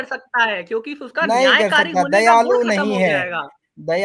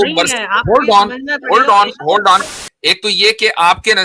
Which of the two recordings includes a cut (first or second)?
second